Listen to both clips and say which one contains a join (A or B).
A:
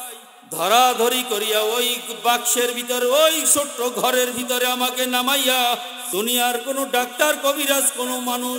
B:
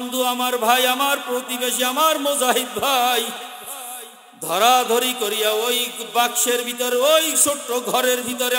A